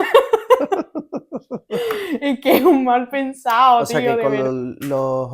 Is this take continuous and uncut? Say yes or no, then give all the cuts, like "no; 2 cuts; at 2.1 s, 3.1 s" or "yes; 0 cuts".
no; 1 cut; at 3.8 s